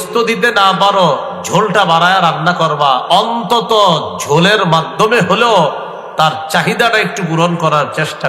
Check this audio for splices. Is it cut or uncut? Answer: uncut